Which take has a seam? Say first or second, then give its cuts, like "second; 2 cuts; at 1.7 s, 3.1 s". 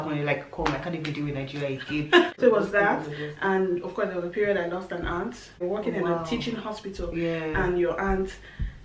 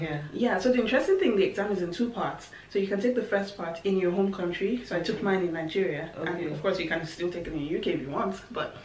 first; 2 cuts; at 2.3 s, 5.6 s